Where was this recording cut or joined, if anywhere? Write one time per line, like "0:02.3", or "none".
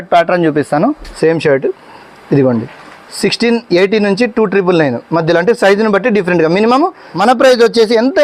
0:01.1
0:07.0